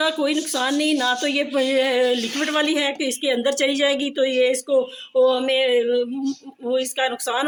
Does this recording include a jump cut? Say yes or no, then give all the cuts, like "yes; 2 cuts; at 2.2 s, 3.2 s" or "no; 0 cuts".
no; 0 cuts